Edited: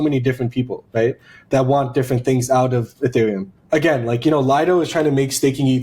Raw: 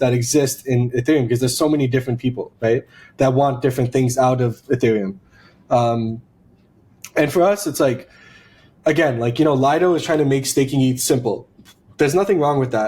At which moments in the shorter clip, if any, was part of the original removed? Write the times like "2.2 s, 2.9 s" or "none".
3.5 s